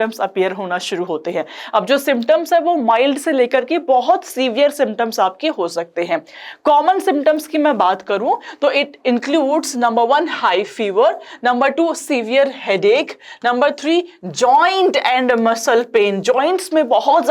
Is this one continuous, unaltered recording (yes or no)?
yes